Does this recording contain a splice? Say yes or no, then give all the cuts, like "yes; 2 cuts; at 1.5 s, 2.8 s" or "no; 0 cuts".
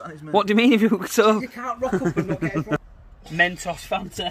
yes; 1 cut; at 2.8 s